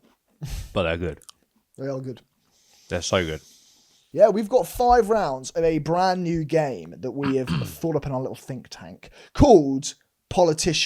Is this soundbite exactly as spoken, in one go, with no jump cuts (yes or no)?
no